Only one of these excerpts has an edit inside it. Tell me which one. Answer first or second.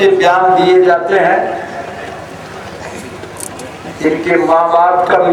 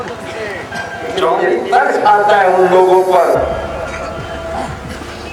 second